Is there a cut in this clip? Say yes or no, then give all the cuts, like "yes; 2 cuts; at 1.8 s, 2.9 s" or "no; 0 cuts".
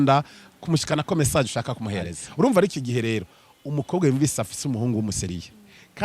yes; 1 cut; at 2.2 s